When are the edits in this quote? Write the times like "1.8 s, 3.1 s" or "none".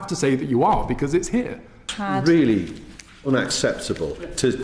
1.9 s